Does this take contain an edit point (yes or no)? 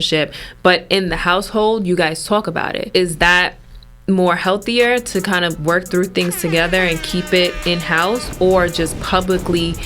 yes